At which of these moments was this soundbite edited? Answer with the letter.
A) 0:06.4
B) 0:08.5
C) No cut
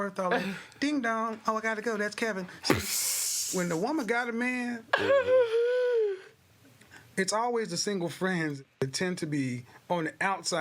B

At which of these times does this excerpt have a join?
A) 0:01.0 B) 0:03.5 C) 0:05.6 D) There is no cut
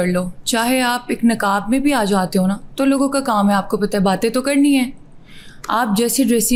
D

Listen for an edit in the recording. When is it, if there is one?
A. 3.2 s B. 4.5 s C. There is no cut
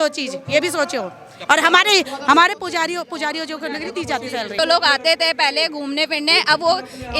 B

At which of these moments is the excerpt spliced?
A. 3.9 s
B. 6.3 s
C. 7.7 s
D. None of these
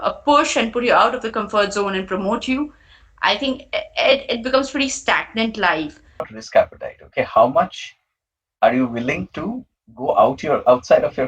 B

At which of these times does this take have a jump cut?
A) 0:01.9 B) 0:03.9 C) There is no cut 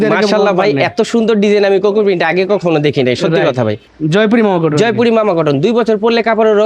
B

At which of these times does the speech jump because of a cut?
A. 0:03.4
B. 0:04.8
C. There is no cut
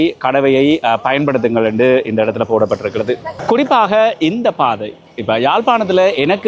A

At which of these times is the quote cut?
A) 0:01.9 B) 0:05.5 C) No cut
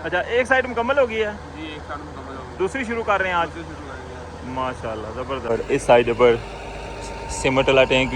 B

